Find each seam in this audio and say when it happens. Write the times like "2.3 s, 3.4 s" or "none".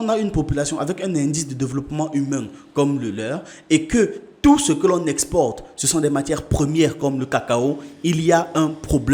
none